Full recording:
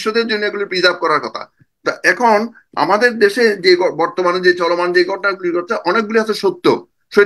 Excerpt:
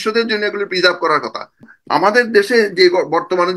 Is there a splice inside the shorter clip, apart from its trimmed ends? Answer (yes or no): yes